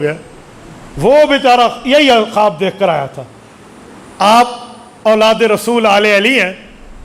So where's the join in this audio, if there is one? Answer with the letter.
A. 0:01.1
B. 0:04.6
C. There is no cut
C